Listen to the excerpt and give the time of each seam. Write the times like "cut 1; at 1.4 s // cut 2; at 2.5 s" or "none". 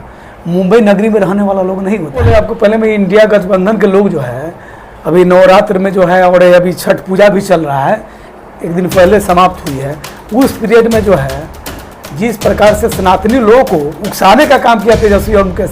cut 1; at 2.3 s